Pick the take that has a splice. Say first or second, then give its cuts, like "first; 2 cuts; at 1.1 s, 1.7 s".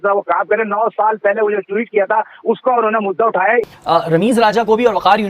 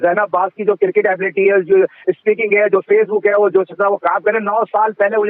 first; 1 cut; at 3.6 s